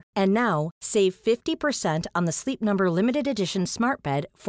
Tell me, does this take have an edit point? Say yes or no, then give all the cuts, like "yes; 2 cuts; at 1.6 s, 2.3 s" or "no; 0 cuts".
no; 0 cuts